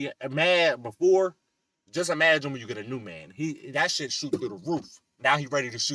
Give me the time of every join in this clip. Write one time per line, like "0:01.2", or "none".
none